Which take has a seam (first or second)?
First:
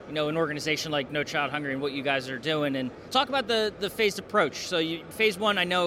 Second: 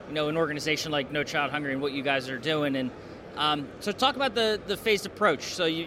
first